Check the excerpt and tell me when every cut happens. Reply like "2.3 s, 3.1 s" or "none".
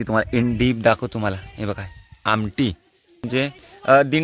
3.3 s

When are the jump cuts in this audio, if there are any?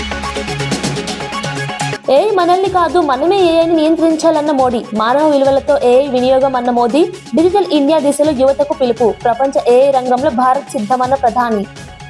2.0 s

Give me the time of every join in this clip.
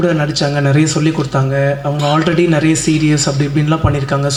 none

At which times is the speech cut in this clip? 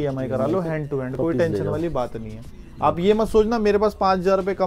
none

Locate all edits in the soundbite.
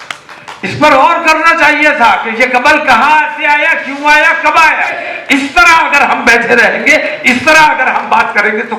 5.1 s

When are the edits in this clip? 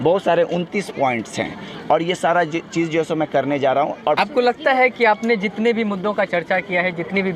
4.2 s

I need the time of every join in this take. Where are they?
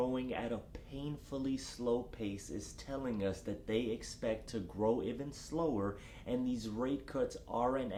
none

